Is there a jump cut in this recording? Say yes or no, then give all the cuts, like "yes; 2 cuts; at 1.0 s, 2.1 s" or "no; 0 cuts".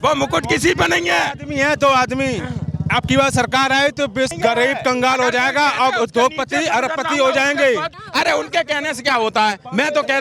yes; 2 cuts; at 4.3 s, 8.0 s